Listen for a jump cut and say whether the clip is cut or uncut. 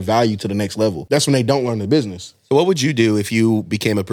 cut